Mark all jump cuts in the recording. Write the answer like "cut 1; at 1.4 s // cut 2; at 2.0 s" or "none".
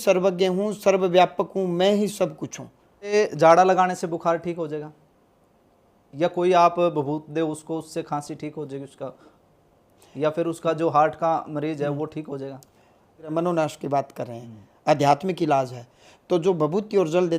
cut 1; at 3.1 s // cut 2; at 13.3 s